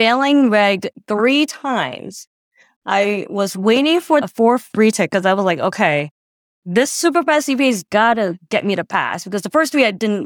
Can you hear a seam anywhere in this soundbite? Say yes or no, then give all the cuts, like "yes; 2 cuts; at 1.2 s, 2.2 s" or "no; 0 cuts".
yes; 1 cut; at 4.2 s